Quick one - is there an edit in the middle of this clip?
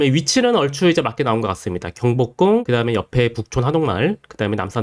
no; 0 cuts

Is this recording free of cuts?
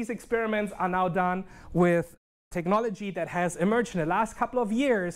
yes; 0 cuts

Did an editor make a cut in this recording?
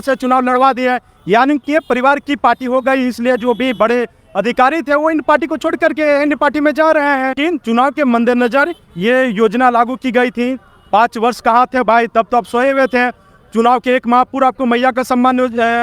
yes; 1 cut; at 7.3 s

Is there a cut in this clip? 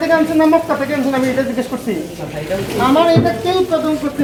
no; 0 cuts

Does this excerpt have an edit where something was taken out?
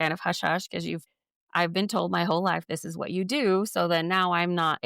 yes; 1 cut; at 1.0 s

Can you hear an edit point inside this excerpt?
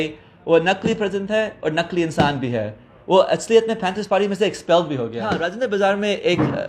yes; 1 cut; at 5.4 s

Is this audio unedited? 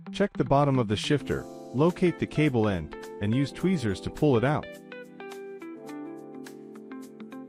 yes; 0 cuts

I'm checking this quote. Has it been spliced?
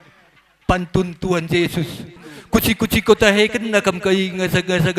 yes; 1 cut; at 2.3 s

